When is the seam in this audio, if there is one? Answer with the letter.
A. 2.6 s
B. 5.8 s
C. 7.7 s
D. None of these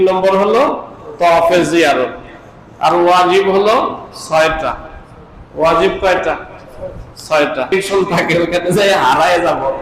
C